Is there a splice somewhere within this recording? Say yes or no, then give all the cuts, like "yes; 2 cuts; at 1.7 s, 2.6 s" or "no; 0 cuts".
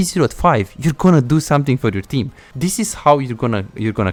no; 0 cuts